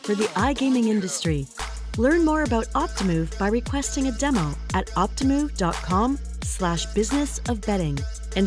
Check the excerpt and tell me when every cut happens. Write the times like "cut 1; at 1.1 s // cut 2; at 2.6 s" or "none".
none

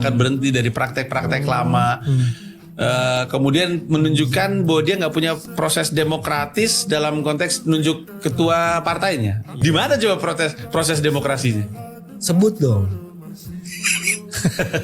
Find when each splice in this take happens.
cut 1; at 9.5 s

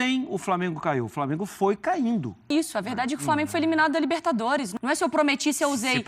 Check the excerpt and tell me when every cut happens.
cut 1; at 2.5 s // cut 2; at 4.7 s

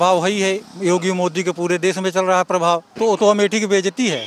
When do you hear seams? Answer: cut 1; at 2.9 s

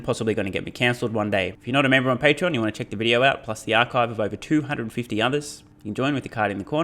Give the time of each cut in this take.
cut 1; at 1.6 s

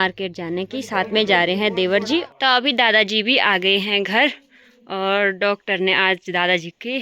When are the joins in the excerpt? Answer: cut 1; at 2.3 s

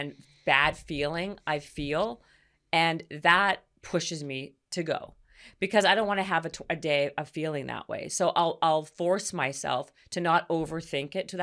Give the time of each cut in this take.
cut 1; at 4.6 s

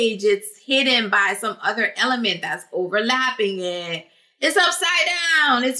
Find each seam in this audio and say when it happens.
none

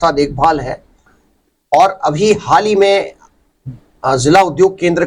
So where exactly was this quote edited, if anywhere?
cut 1; at 1.1 s

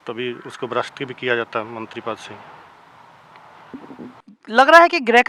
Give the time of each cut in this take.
cut 1; at 4.3 s

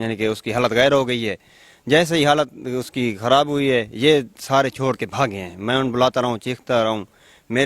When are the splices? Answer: none

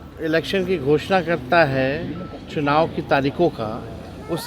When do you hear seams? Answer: none

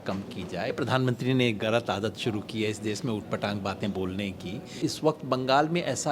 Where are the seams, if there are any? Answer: cut 1; at 0.7 s // cut 2; at 4.7 s

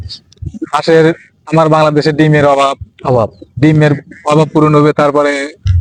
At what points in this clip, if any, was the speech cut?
none

